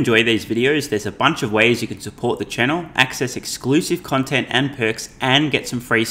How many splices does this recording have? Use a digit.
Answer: 0